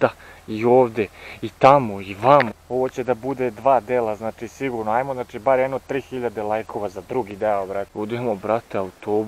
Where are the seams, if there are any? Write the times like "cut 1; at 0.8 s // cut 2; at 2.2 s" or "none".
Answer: cut 1; at 2.6 s // cut 2; at 7.9 s

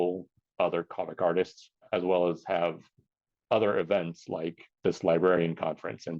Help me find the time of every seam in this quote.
cut 1; at 1.9 s // cut 2; at 4.6 s

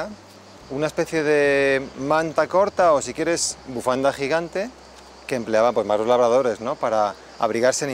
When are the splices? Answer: none

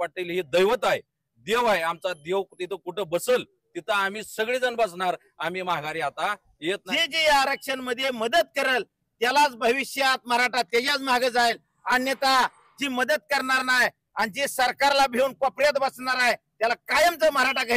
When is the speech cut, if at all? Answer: cut 1; at 6.8 s

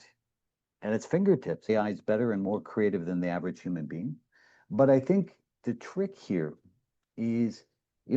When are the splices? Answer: cut 1; at 1.7 s // cut 2; at 5.5 s

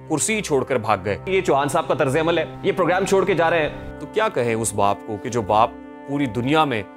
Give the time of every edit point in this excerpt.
cut 1; at 1.2 s // cut 2; at 3.8 s

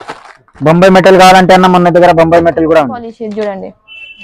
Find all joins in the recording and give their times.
cut 1; at 3.1 s

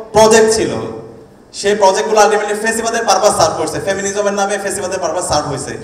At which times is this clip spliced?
none

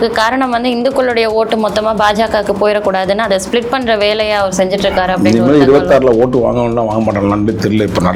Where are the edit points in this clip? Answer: none

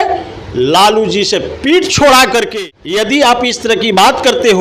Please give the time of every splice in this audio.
cut 1; at 2.5 s

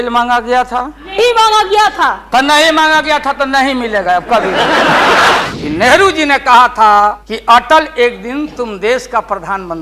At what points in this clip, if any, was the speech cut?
cut 1; at 1.0 s // cut 2; at 5.4 s // cut 3; at 7.3 s

